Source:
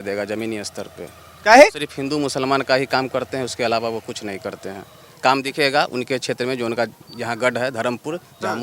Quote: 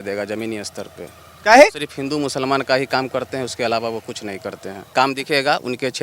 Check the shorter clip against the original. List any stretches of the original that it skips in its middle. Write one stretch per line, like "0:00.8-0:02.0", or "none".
0:04.7-0:05.0